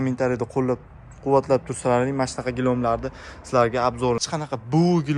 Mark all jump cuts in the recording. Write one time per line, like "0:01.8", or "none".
0:04.2